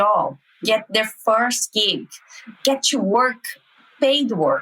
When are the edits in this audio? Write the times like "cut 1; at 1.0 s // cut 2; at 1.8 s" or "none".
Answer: cut 1; at 2.5 s

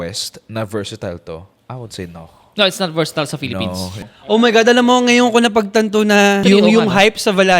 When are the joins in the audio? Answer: cut 1; at 4.0 s // cut 2; at 6.4 s

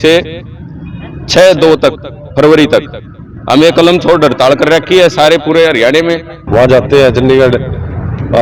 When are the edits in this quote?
cut 1; at 6.3 s

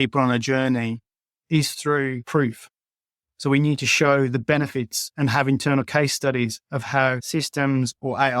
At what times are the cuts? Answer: cut 1; at 2.2 s // cut 2; at 7.2 s

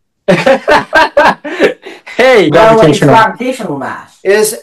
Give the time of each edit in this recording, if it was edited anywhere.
cut 1; at 2.5 s

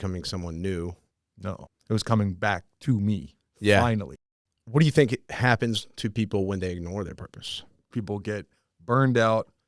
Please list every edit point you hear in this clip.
cut 1; at 1.5 s // cut 2; at 4.1 s // cut 3; at 5.3 s // cut 4; at 7.9 s

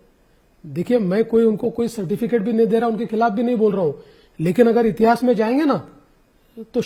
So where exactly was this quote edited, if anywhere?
none

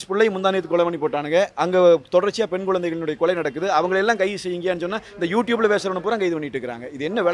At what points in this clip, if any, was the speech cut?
none

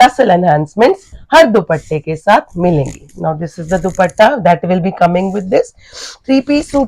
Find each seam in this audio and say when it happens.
none

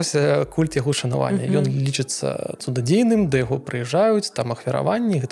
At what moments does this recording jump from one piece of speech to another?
none

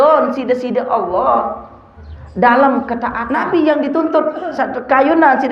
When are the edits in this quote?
cut 1; at 3.2 s

